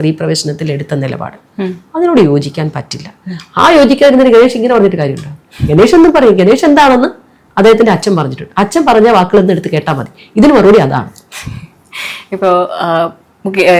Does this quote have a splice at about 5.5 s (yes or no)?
no